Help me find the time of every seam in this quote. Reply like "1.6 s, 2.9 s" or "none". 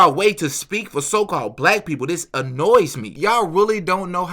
3.0 s